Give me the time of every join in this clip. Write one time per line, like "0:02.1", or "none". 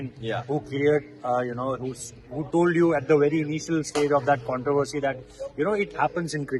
none